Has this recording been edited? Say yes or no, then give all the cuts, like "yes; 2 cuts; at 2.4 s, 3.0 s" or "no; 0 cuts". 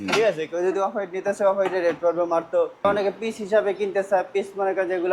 yes; 1 cut; at 2.8 s